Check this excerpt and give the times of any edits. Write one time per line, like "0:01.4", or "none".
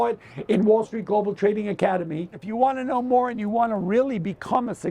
0:02.4